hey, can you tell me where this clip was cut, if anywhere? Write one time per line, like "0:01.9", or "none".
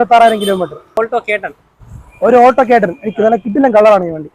0:01.3